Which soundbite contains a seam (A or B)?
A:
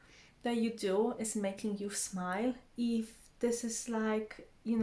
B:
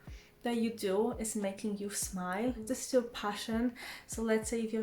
B